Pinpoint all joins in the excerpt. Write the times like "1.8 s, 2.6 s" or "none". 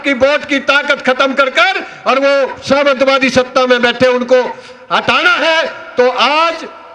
none